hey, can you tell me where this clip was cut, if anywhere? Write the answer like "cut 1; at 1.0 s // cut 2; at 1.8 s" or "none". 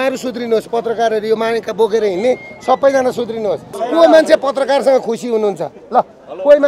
cut 1; at 3.8 s